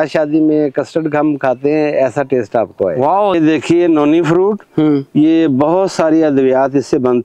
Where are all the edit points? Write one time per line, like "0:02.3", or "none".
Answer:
0:03.3